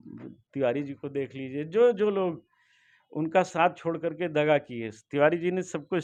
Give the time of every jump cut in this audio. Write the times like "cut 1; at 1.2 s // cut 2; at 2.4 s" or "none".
none